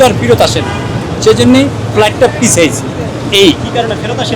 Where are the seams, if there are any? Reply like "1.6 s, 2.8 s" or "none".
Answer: none